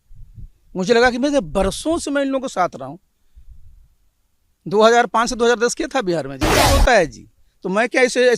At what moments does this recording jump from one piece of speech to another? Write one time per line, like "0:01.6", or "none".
0:06.7